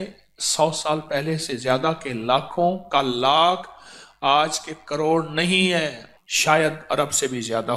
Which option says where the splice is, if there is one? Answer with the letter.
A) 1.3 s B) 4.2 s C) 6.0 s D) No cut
C